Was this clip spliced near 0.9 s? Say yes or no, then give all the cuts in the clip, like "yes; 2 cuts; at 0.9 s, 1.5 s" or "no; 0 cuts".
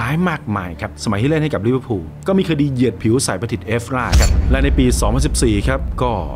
yes; 1 cut; at 0.9 s